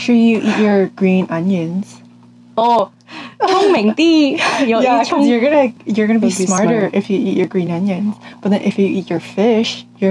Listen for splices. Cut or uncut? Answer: uncut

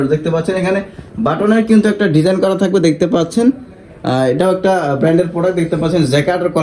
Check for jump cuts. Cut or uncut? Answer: uncut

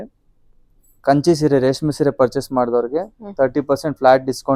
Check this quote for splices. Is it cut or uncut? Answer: uncut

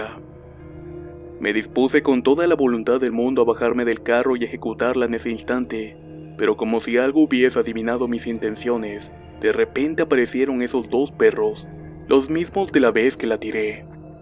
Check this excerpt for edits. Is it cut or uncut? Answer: uncut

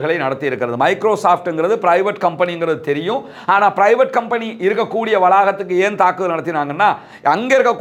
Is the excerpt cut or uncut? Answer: uncut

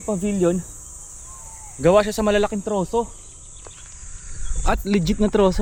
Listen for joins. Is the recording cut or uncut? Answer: uncut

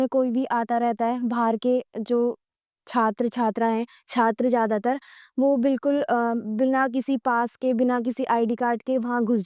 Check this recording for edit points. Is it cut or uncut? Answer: uncut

